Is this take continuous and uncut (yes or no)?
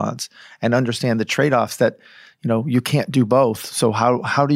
yes